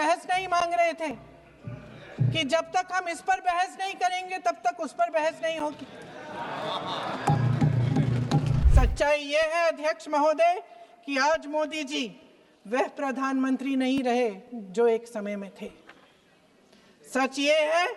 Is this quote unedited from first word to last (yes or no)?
no